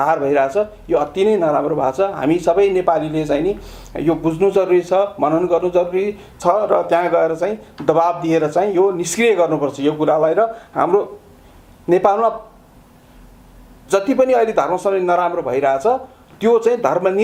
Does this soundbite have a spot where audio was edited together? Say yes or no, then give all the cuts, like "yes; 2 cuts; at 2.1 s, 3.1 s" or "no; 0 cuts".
no; 0 cuts